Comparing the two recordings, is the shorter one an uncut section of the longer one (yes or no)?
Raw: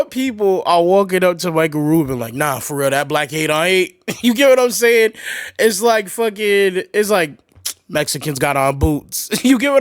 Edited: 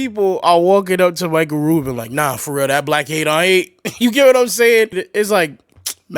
no